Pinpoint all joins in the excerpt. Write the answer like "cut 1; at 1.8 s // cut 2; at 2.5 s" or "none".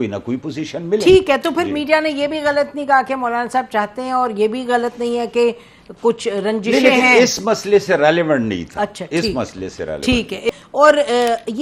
cut 1; at 10.5 s